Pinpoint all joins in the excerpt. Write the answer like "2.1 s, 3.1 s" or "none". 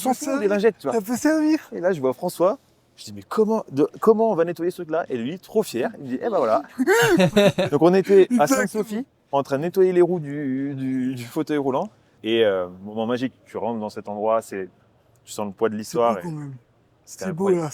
12.2 s